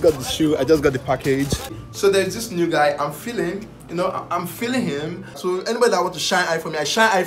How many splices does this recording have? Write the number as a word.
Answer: two